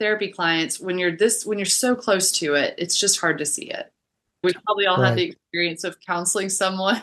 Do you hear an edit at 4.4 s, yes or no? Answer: yes